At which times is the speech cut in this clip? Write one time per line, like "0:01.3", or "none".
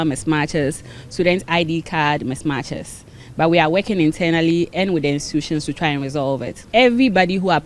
0:06.5